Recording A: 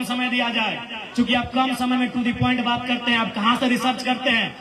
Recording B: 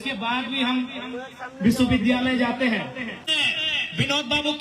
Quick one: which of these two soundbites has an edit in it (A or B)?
B